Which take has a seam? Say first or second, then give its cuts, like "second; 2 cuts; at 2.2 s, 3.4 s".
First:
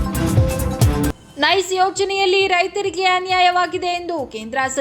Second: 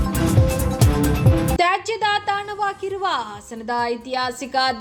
first; 1 cut; at 1.1 s